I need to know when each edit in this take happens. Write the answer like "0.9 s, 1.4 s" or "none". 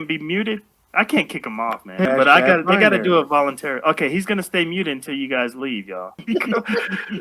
2.1 s, 6.2 s